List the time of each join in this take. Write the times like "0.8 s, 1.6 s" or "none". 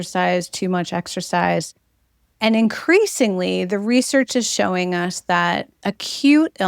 5.7 s